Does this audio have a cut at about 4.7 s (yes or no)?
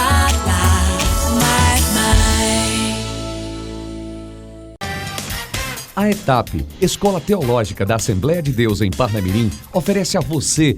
yes